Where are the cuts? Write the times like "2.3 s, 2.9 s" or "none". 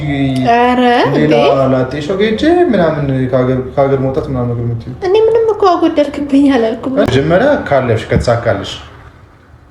7.1 s